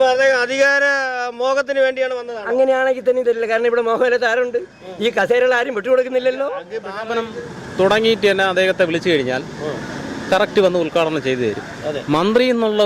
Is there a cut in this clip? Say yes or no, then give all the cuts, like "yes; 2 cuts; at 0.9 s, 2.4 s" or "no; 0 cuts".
yes; 1 cut; at 7.1 s